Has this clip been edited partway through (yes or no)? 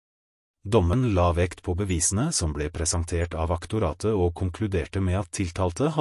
yes